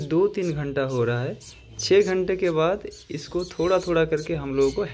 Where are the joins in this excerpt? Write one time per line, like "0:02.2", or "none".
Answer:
none

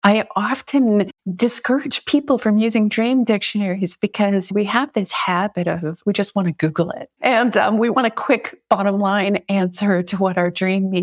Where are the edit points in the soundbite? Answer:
0:01.2

